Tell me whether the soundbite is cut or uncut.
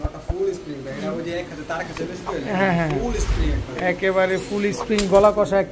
uncut